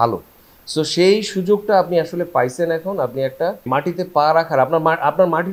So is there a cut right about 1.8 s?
no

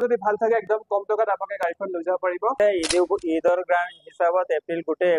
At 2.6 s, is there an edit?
yes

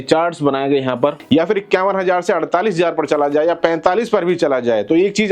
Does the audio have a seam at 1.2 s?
yes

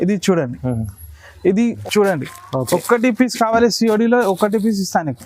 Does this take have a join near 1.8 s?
yes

